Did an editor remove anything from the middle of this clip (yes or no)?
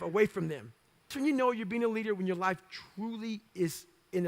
yes